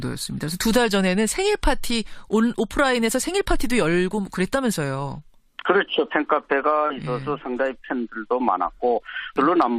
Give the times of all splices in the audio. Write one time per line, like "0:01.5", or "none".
none